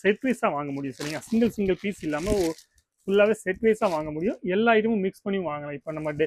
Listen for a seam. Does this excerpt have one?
no; 0 cuts

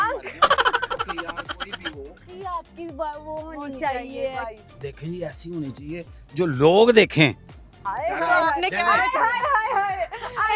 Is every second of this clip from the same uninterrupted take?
no; 1 cut; at 2.3 s

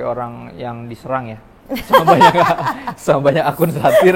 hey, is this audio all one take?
yes; 0 cuts

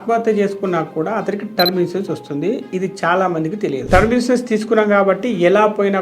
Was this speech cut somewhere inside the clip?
yes; 1 cut; at 3.8 s

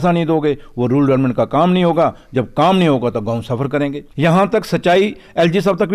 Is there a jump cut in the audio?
yes; 1 cut; at 4.0 s

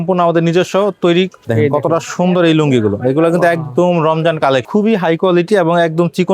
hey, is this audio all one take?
no; 2 cuts; at 1.4 s, 4.7 s

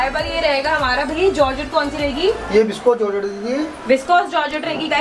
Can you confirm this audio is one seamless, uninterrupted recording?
yes; 0 cuts

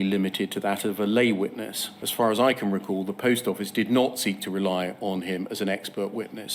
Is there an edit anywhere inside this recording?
yes; 1 cut; at 1.9 s

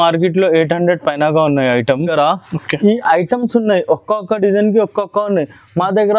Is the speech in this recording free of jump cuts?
no; 1 cut; at 2.1 s

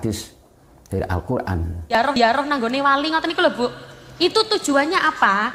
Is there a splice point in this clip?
yes; 1 cut; at 2.0 s

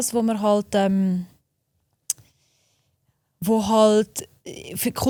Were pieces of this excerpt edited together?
no; 0 cuts

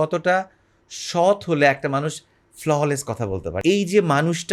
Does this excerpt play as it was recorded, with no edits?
no; 1 cut; at 3.6 s

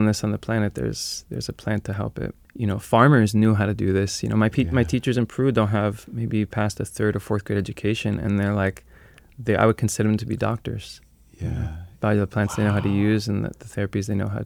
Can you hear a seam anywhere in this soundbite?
yes; 1 cut; at 2.4 s

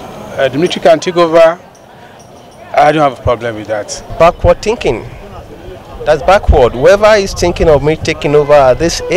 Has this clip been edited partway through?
yes; 1 cut; at 4.0 s

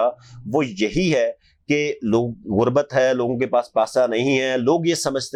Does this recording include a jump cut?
no; 0 cuts

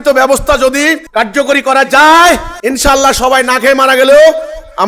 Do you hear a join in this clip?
yes; 2 cuts; at 1.0 s, 2.5 s

